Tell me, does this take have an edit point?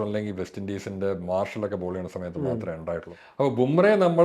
yes; 1 cut; at 3.2 s

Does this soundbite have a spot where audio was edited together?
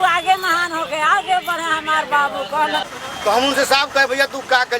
yes; 1 cut; at 2.9 s

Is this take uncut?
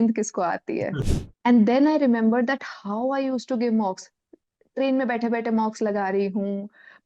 no; 1 cut; at 1.0 s

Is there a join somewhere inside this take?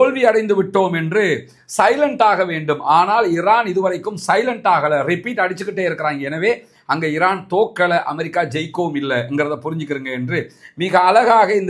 no; 0 cuts

